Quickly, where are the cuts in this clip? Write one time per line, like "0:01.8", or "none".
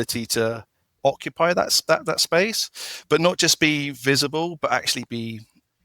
none

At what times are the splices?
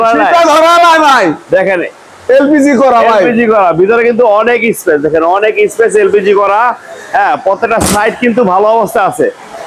none

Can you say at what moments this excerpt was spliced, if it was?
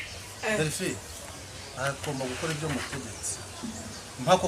0:01.7

